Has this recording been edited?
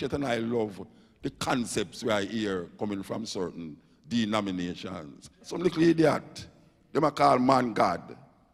yes; 1 cut; at 5.5 s

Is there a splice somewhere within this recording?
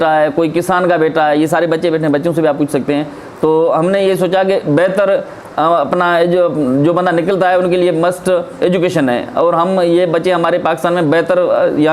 no; 0 cuts

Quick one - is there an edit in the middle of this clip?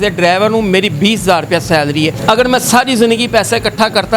yes; 1 cut; at 2.2 s

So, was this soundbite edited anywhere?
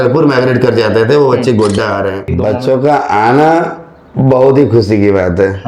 yes; 1 cut; at 2.3 s

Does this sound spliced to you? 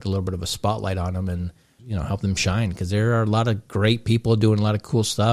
no; 0 cuts

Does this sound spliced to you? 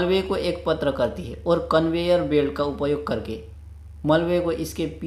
no; 0 cuts

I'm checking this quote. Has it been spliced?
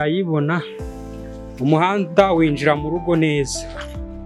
no; 0 cuts

